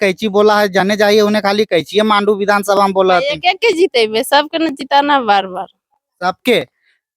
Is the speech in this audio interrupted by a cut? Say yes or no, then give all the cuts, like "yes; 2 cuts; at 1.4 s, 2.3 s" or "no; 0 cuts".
no; 0 cuts